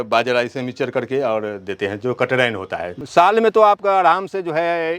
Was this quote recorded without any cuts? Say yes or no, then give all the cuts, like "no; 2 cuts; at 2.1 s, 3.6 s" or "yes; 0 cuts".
no; 1 cut; at 2.9 s